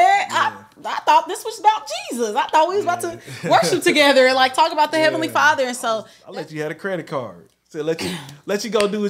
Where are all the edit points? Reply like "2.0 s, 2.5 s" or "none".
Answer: 6.2 s

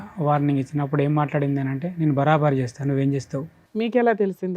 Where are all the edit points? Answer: 3.6 s

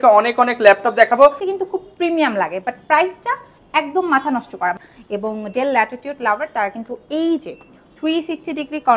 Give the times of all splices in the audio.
1.4 s, 4.9 s

